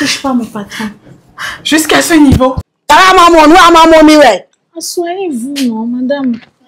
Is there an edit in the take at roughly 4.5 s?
no; 1 cut; at 2.7 s

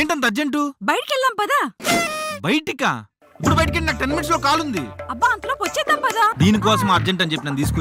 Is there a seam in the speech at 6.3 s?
yes; 1 cut; at 6.3 s

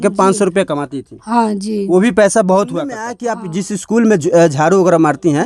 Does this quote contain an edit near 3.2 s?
yes; 1 cut; at 3.2 s

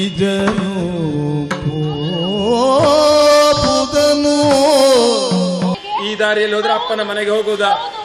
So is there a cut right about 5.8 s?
yes; 1 cut; at 5.8 s

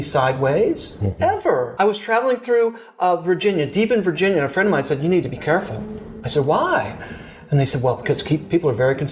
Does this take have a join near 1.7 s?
yes; 1 cut; at 1.7 s

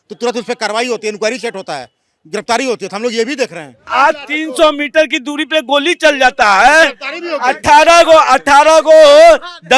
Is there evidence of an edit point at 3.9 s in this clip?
yes; 1 cut; at 3.9 s

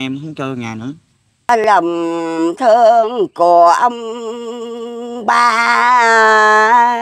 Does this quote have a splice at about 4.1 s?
no; 1 cut; at 1.5 s

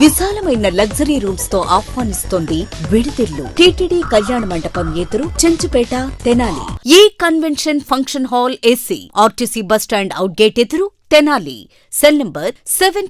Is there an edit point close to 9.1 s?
no; 2 cuts; at 3.4 s, 6.7 s

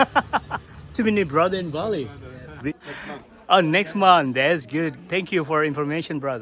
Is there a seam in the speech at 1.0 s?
no; 1 cut; at 2.7 s

